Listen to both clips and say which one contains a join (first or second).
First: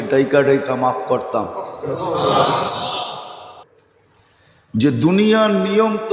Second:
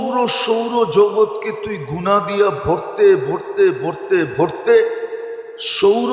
first